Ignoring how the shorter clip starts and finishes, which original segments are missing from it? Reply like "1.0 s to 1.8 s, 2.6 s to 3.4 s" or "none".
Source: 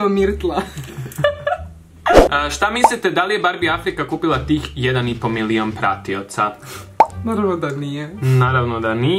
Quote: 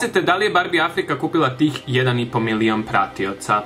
none